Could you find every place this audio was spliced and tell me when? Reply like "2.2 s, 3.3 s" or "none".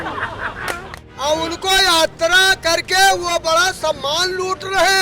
0.9 s